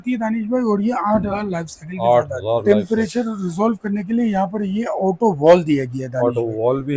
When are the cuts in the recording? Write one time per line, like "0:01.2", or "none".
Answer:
0:02.6